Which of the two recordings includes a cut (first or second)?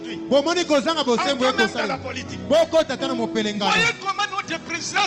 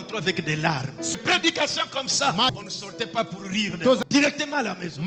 second